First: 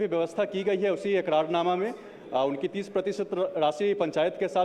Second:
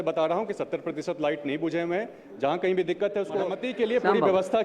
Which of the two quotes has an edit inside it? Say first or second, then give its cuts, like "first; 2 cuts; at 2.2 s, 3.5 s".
second; 1 cut; at 3.6 s